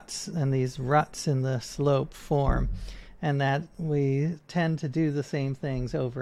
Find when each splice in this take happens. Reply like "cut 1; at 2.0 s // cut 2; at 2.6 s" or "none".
cut 1; at 3.7 s